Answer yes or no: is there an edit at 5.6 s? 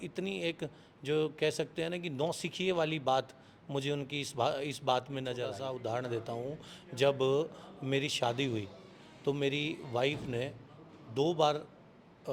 yes